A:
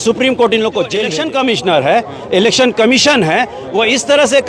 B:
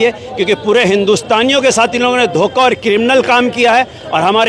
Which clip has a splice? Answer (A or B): A